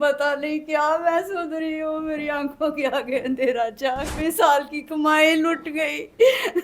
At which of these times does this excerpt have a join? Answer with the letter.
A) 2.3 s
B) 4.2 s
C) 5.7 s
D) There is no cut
B